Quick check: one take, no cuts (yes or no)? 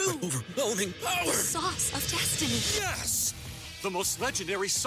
yes